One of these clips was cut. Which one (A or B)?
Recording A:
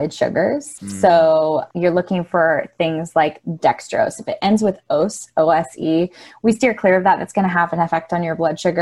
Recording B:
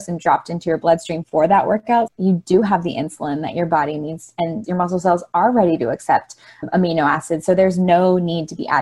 B